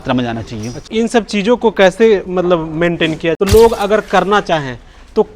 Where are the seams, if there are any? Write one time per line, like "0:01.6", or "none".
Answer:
0:00.9
0:03.4